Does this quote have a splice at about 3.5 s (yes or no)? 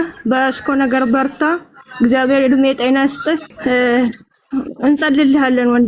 yes